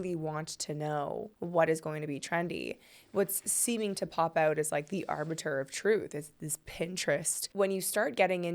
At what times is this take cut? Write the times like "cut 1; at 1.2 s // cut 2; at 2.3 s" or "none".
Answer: cut 1; at 1.3 s // cut 2; at 7.5 s